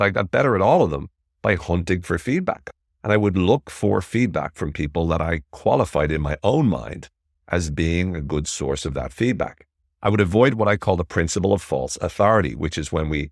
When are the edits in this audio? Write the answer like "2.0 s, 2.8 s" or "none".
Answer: 2.6 s